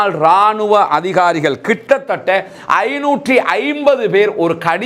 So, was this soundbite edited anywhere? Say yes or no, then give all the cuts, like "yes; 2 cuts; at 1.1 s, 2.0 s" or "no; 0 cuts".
no; 0 cuts